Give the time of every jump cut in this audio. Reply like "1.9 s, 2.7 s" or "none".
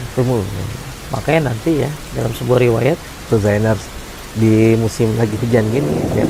3.2 s